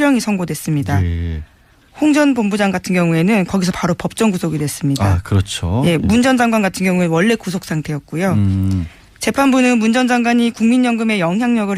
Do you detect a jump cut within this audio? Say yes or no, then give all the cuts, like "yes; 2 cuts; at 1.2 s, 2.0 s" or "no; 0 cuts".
no; 0 cuts